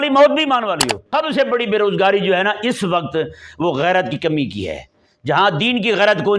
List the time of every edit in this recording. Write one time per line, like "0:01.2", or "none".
0:01.0

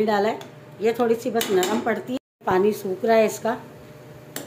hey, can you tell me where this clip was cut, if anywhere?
0:02.1

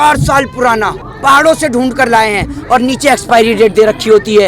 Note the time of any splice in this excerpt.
0:01.0

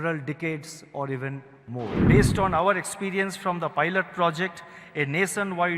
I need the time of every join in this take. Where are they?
0:02.0

